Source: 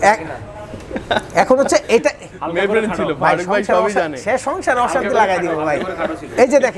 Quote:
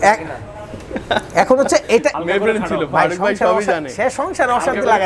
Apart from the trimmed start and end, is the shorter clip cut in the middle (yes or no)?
yes